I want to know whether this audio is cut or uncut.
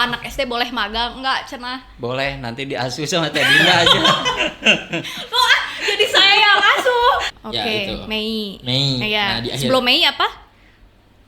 cut